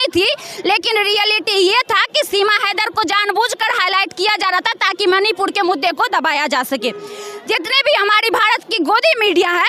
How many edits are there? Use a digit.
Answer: 0